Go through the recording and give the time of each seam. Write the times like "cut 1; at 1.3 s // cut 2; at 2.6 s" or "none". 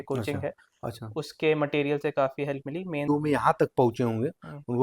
cut 1; at 3.1 s